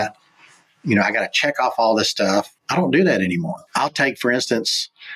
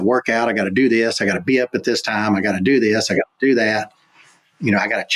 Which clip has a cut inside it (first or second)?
first